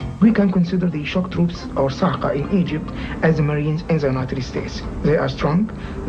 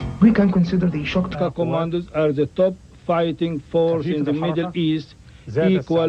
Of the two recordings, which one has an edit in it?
first; 1 cut; at 1.3 s

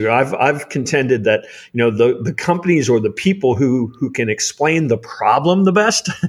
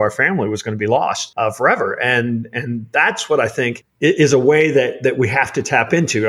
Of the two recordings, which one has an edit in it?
second; 2 cuts; at 1.2 s, 3.8 s

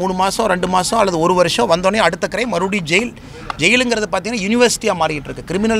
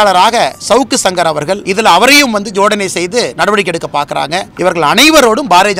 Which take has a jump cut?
second; 2 cuts; at 1.6 s, 4.5 s

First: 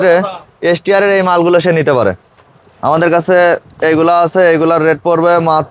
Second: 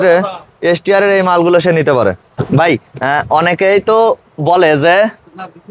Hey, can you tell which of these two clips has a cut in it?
first; 1 cut; at 2.3 s

